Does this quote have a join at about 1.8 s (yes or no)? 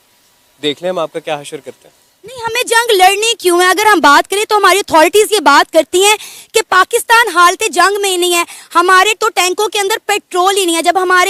no